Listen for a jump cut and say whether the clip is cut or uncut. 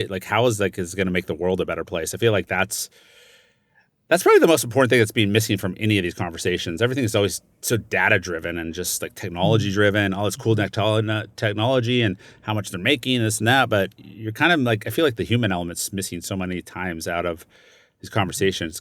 uncut